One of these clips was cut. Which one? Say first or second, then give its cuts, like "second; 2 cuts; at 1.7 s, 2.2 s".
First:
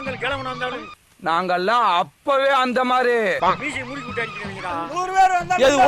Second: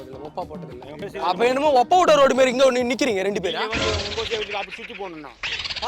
second; 1 cut; at 1.0 s